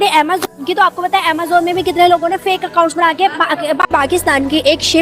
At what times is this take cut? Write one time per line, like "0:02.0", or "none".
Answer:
0:03.9